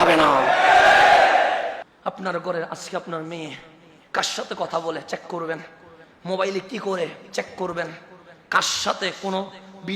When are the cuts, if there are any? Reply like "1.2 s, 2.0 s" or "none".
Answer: 1.8 s